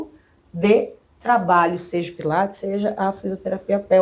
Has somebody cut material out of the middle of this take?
no; 0 cuts

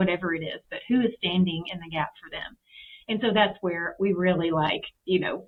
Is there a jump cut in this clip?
no; 0 cuts

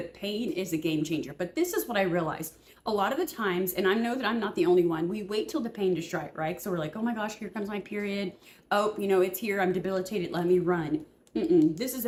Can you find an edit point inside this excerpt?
no; 0 cuts

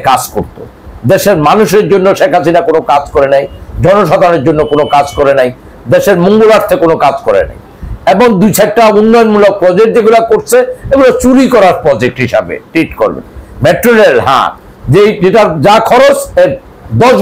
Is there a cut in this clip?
no; 0 cuts

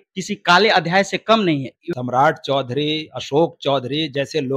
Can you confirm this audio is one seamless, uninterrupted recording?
no; 1 cut; at 1.9 s

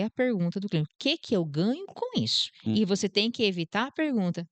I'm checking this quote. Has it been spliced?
no; 0 cuts

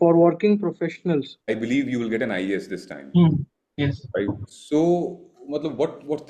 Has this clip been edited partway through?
yes; 1 cut; at 1.4 s

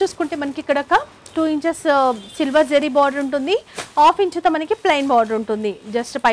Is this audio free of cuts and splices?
yes; 0 cuts

